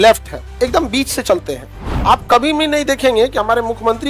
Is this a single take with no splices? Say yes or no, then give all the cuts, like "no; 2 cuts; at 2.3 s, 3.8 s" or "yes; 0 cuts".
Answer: yes; 0 cuts